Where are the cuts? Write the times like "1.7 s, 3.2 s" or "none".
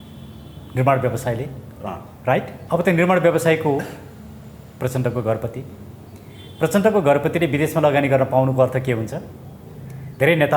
2.6 s

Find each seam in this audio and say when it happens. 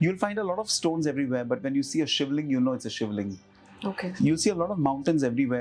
none

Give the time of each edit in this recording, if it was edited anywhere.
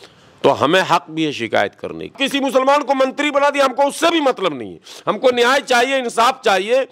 2.1 s

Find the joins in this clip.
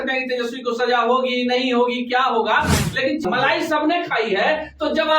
3.2 s

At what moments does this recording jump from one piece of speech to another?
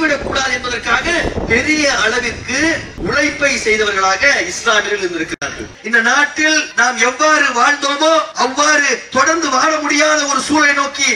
2.9 s, 5.7 s, 6.7 s, 8.3 s

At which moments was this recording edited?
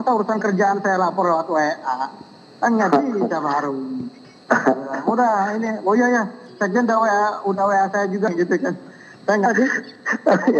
8.3 s, 9.5 s

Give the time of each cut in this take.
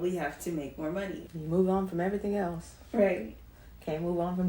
1.2 s

